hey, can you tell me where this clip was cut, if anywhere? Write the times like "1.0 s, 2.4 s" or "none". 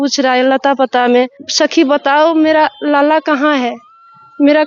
1.4 s